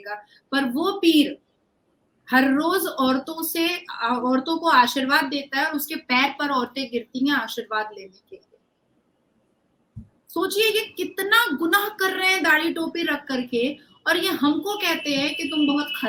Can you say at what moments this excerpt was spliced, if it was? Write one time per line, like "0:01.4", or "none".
none